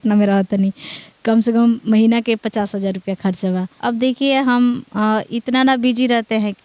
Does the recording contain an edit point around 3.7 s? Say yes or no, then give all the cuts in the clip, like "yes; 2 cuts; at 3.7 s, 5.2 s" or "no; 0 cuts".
yes; 1 cut; at 3.7 s